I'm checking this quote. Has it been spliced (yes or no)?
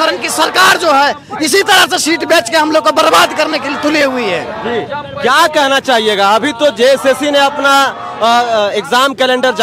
no